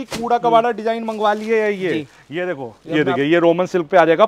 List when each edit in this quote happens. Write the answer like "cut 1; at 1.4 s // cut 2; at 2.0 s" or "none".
cut 1; at 2.8 s